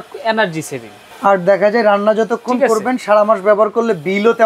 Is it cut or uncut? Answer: cut